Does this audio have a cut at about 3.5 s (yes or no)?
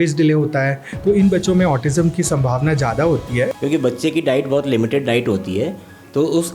yes